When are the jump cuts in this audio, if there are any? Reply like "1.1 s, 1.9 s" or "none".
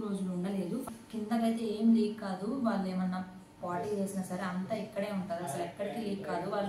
1.0 s